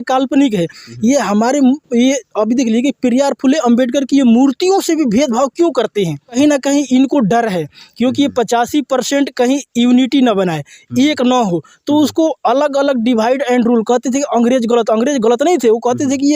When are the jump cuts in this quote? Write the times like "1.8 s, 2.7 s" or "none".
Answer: 6.4 s